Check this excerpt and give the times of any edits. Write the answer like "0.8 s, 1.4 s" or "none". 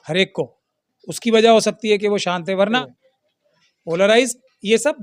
2.8 s